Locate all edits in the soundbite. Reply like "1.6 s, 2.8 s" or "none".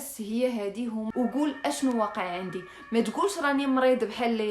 1.1 s